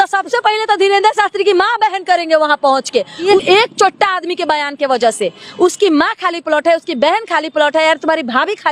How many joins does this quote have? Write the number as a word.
one